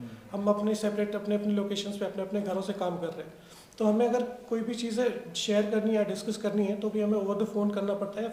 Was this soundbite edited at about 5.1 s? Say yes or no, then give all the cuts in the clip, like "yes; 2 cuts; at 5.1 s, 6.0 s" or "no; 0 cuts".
no; 0 cuts